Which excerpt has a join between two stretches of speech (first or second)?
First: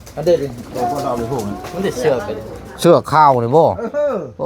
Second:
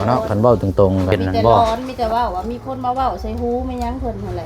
second